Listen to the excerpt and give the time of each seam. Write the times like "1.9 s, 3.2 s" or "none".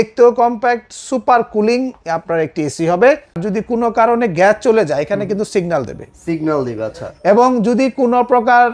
3.4 s